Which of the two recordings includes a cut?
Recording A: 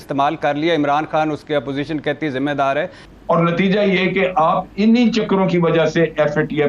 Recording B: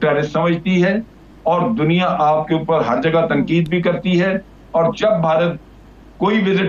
A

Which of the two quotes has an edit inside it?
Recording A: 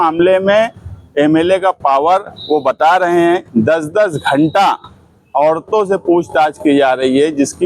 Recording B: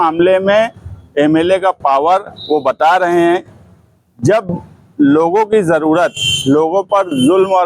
A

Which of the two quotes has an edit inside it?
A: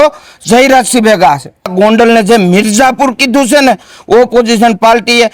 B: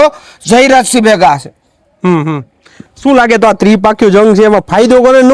A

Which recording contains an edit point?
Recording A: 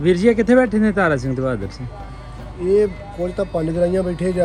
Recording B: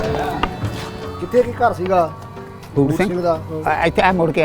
B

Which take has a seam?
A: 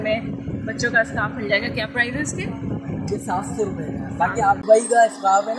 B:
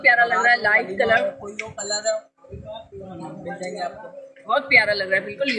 A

